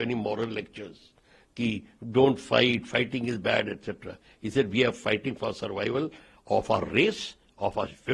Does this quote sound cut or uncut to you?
uncut